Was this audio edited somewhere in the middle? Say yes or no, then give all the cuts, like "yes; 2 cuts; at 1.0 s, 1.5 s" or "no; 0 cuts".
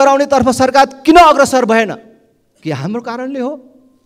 no; 0 cuts